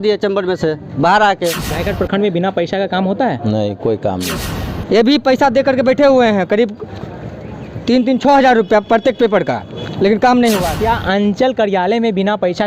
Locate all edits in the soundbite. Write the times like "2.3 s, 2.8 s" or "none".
1.6 s, 4.5 s, 10.7 s